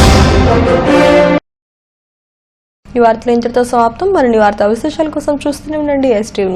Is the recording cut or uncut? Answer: uncut